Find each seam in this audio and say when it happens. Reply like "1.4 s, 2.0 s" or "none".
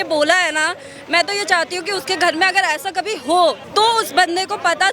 3.6 s